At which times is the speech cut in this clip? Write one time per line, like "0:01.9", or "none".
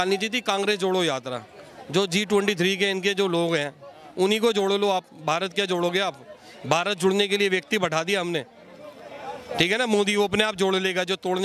none